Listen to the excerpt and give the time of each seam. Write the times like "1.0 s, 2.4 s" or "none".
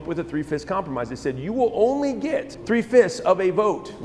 2.5 s